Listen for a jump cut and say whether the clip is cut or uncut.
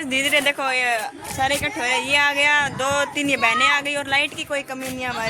uncut